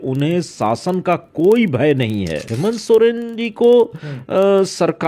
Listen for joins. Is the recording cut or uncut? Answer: cut